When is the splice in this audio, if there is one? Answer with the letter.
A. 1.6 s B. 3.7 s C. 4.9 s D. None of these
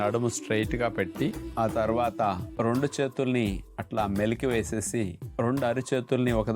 D